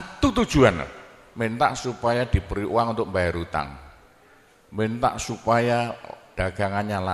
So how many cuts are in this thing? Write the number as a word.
zero